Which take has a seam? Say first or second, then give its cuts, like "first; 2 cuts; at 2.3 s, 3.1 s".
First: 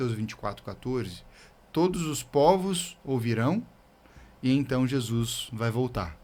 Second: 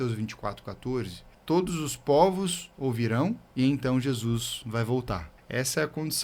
second; 3 cuts; at 1.2 s, 3.4 s, 5.3 s